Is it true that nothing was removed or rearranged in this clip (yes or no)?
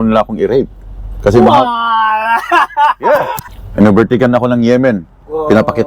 no